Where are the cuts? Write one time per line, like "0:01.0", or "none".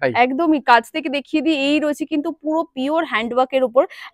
none